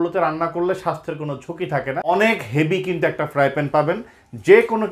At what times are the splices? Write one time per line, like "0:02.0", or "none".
0:02.0